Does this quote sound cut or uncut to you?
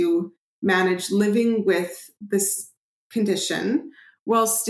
uncut